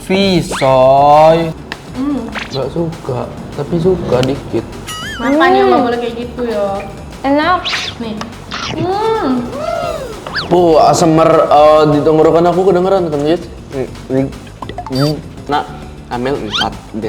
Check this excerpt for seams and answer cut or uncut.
cut